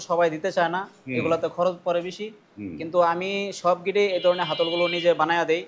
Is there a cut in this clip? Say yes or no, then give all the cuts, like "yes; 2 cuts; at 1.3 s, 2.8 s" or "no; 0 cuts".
no; 0 cuts